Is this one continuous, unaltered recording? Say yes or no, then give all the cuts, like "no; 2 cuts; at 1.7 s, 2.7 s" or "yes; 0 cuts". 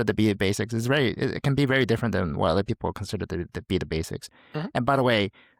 yes; 0 cuts